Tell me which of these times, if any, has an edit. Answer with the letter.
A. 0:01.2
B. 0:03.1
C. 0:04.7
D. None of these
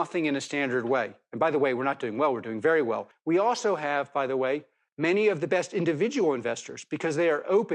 B